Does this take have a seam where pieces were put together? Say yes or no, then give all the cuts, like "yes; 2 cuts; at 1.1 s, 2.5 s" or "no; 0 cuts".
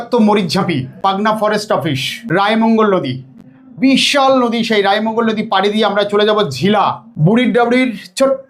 yes; 3 cuts; at 1.0 s, 2.1 s, 7.0 s